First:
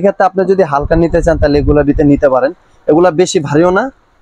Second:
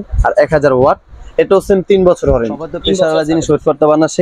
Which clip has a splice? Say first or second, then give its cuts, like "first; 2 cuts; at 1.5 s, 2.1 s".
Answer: second; 1 cut; at 3.0 s